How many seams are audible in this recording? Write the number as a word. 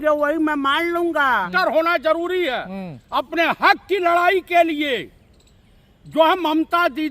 one